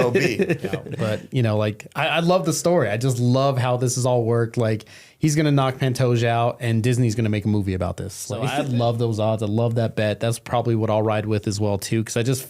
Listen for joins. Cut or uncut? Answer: cut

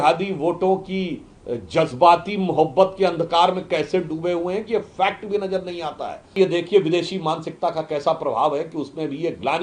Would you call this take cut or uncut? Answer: cut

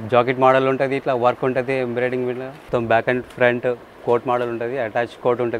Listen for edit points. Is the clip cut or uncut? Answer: cut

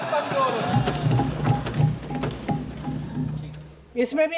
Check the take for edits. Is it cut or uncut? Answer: uncut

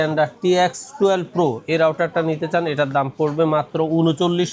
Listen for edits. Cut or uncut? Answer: uncut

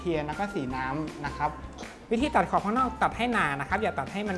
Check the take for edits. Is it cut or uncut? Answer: cut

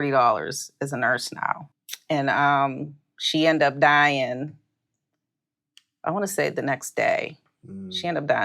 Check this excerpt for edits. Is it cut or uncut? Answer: cut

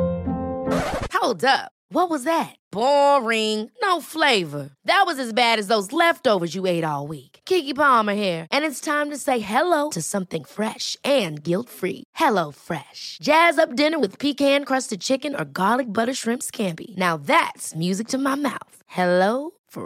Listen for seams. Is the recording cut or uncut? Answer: uncut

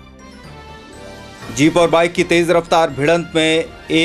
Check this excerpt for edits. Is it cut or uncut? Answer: cut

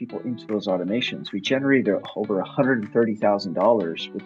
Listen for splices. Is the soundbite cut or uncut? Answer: uncut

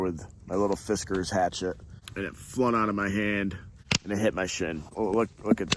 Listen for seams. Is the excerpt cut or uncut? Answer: cut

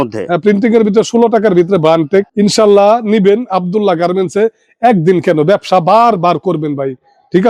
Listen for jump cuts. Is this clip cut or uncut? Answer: uncut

